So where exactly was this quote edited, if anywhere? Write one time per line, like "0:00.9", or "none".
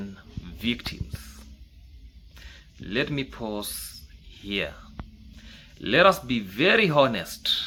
none